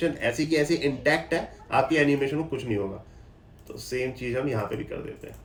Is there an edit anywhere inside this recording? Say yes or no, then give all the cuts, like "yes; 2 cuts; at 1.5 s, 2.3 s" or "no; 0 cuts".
no; 0 cuts